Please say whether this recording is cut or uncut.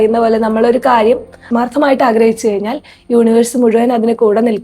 cut